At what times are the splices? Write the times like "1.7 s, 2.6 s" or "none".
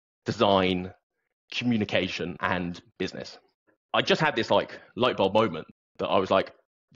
2.4 s, 3.7 s